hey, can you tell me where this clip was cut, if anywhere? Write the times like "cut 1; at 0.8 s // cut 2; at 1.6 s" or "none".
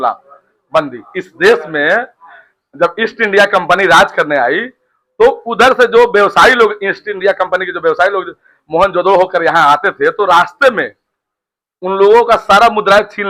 none